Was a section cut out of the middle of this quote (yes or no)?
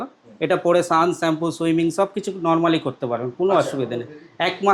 no